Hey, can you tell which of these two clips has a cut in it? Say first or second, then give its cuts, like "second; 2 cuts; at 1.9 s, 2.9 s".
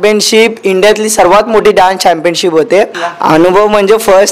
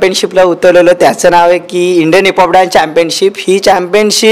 first; 1 cut; at 3.0 s